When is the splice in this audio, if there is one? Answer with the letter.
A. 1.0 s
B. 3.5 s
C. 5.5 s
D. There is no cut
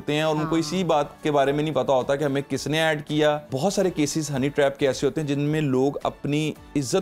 B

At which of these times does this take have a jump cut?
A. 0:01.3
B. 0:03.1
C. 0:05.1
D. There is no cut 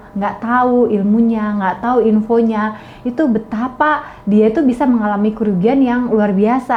D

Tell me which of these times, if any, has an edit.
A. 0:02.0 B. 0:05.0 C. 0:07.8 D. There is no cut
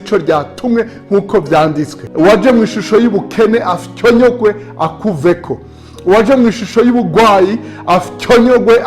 A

